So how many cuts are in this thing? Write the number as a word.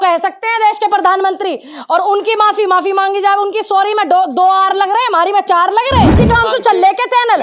one